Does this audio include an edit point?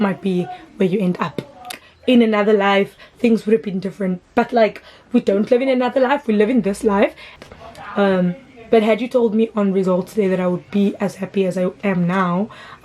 yes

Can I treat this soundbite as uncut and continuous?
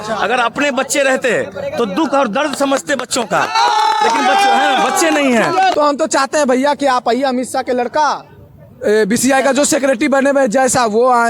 no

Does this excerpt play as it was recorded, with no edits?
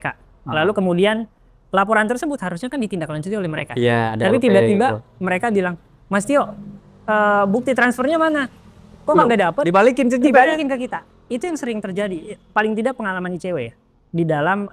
yes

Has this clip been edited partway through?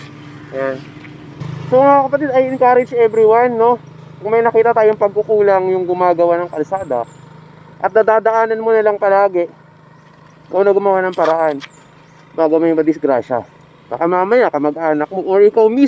yes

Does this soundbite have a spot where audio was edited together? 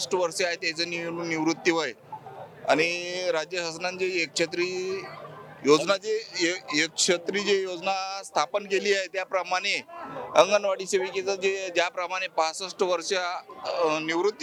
no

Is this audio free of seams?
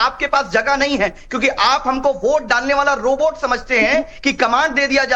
yes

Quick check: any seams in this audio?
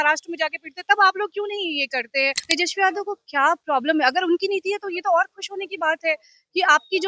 yes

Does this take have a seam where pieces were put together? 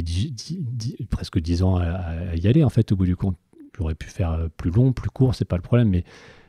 no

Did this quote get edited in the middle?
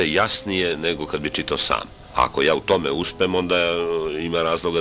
yes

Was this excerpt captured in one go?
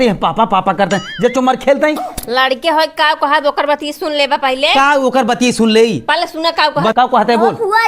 no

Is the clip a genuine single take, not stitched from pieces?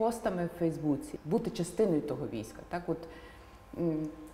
no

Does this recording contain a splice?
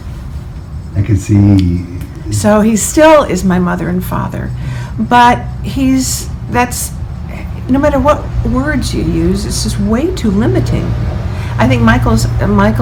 no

